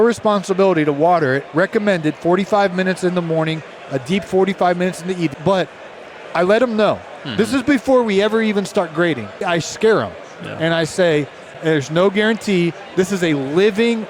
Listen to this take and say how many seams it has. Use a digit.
3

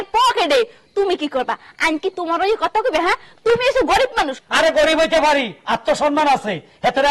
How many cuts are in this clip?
1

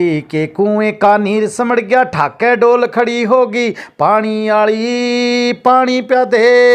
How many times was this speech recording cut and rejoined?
0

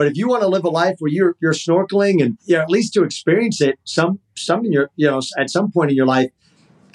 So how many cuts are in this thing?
1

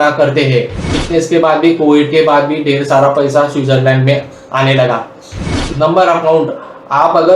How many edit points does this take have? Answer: 2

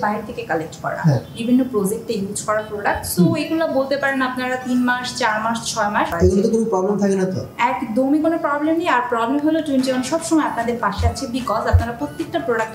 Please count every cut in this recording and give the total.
1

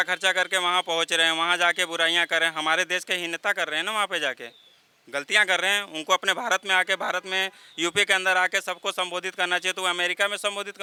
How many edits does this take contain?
0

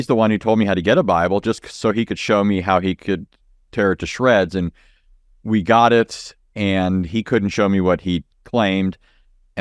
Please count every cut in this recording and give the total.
0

